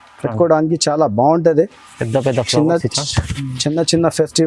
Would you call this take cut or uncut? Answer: uncut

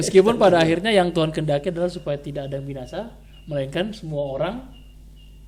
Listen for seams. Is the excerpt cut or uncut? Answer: uncut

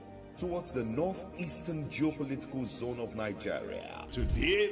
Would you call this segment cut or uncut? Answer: uncut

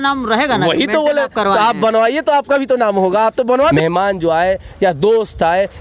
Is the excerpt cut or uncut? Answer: cut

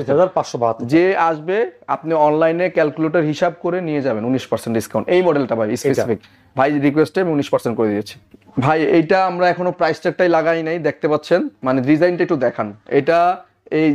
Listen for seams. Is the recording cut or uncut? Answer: uncut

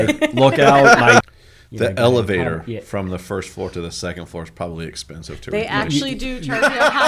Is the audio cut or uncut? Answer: cut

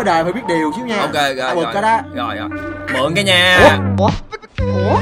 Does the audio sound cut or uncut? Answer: uncut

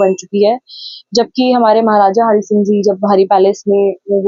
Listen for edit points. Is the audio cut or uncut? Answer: uncut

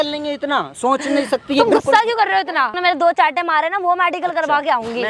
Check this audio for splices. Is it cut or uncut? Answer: cut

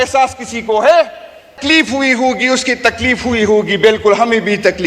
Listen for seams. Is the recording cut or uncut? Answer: cut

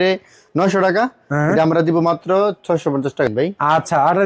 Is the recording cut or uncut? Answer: cut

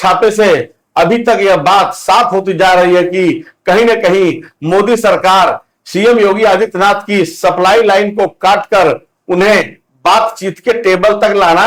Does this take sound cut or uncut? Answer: uncut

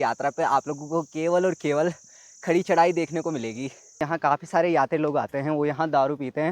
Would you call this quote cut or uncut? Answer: cut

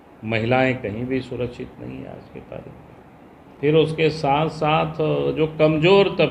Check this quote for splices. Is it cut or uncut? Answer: cut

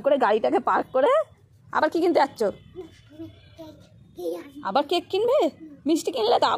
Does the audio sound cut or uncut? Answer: uncut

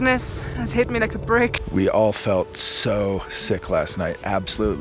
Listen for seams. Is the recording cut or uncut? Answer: uncut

